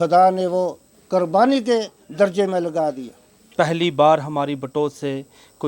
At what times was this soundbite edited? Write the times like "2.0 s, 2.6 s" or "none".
3.5 s